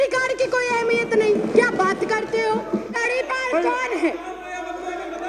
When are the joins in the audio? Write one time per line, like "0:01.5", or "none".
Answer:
0:03.0